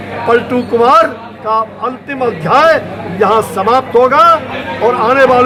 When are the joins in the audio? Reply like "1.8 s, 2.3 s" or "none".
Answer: none